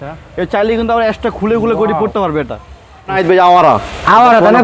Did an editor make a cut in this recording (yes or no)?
yes